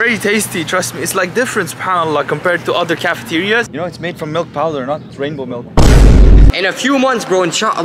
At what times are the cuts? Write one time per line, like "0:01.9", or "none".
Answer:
0:03.7
0:06.5